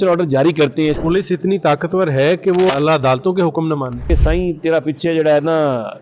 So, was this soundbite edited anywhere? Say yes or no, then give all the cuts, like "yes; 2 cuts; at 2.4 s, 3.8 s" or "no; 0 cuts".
yes; 3 cuts; at 1.0 s, 2.7 s, 4.1 s